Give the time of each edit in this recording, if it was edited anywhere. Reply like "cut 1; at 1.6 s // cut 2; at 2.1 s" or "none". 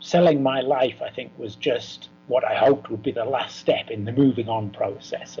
cut 1; at 2.1 s